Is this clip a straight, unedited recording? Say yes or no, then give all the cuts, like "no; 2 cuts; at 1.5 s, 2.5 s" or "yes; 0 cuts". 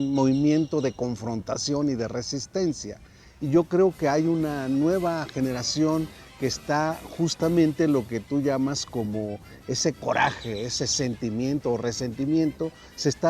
yes; 0 cuts